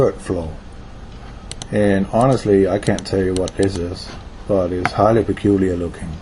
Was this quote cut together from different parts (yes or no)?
yes